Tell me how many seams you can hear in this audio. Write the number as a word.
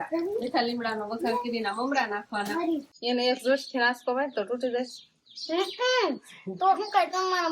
one